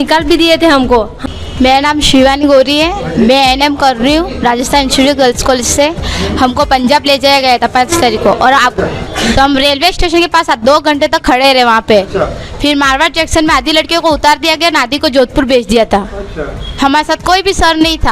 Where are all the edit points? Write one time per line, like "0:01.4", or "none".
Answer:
0:01.1
0:09.1